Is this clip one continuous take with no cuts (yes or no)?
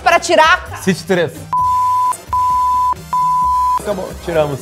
yes